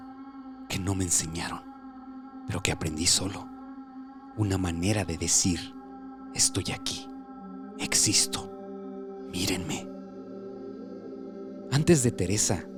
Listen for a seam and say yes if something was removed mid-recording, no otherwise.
no